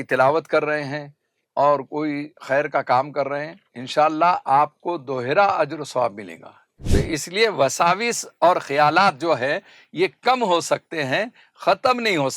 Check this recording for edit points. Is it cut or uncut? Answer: cut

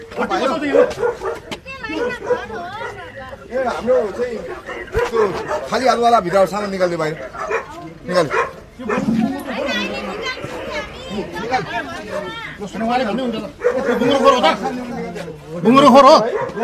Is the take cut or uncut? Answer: uncut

